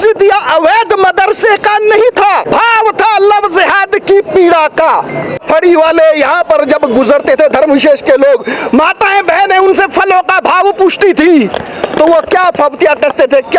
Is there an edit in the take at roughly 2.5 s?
yes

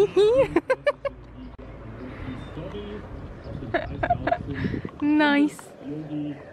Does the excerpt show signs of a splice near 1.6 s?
no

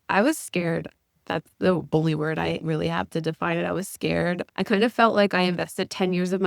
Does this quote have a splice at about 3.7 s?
no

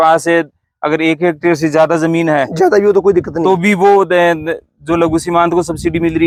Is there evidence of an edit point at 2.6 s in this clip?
no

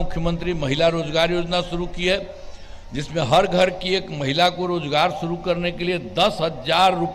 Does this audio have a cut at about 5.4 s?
no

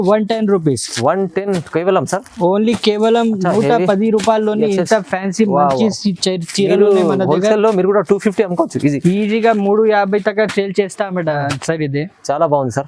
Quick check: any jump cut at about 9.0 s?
no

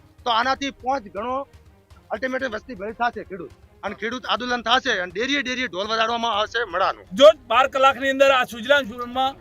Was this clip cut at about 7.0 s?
yes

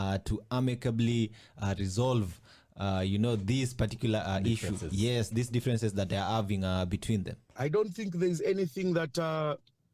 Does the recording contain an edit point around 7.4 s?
yes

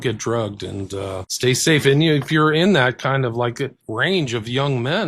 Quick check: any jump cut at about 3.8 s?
yes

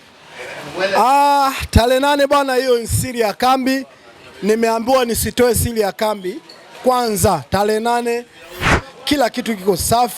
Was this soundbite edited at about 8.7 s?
yes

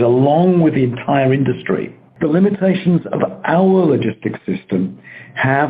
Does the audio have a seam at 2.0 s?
yes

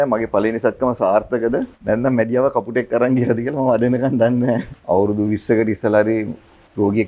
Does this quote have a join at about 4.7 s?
yes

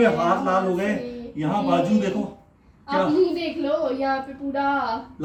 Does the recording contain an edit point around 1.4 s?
no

